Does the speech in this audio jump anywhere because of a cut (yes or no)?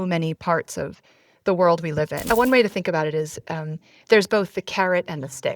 yes